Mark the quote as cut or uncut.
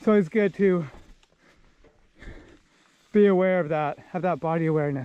uncut